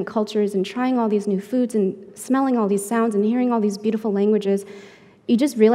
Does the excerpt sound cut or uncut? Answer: uncut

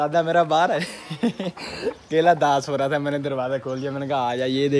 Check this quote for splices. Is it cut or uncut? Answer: cut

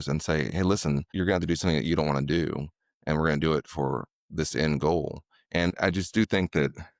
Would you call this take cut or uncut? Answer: cut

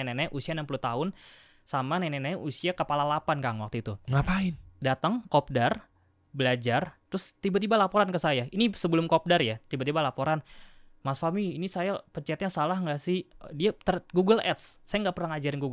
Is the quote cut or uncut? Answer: uncut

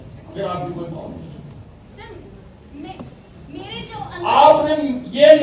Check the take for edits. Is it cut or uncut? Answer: uncut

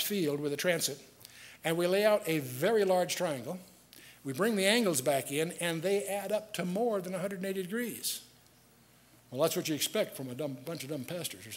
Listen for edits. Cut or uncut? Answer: cut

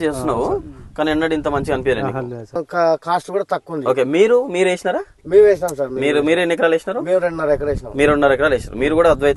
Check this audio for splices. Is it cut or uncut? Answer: cut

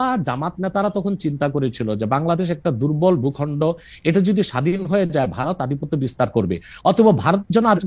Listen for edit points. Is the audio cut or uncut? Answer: uncut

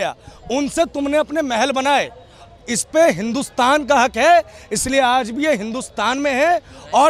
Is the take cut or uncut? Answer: uncut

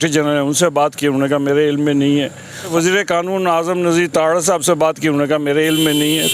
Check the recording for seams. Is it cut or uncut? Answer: cut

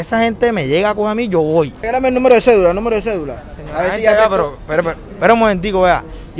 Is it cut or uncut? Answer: cut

